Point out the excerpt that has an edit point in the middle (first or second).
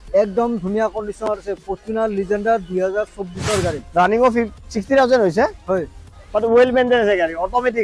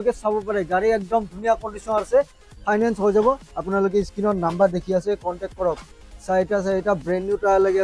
first